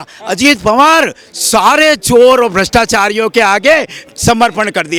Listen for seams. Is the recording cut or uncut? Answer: uncut